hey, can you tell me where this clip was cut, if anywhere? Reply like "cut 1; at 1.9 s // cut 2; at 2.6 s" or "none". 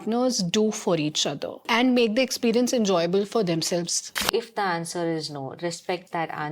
cut 1; at 1.7 s // cut 2; at 4.1 s